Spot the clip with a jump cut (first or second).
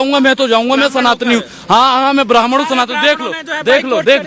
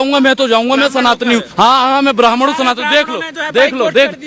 second